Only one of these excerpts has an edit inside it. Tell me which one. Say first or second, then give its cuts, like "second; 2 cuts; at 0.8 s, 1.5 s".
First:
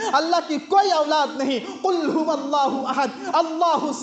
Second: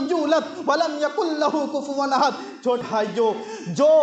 second; 1 cut; at 2.8 s